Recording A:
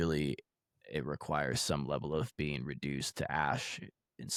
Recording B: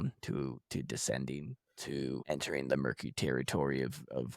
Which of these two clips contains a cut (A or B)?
B